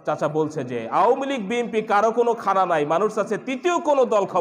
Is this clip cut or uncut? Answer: uncut